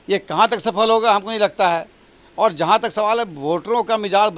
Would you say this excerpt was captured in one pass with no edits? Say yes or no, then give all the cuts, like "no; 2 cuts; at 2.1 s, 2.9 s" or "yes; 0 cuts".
yes; 0 cuts